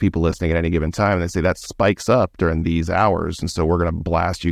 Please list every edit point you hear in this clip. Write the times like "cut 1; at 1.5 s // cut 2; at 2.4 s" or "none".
none